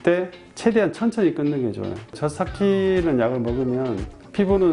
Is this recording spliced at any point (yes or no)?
yes